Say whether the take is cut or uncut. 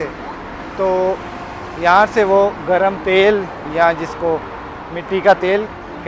uncut